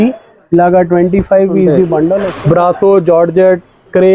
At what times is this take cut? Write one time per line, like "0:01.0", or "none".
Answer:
0:02.3